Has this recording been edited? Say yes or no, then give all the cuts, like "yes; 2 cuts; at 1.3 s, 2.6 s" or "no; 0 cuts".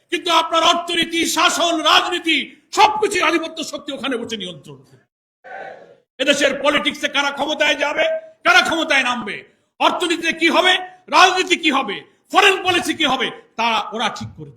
no; 0 cuts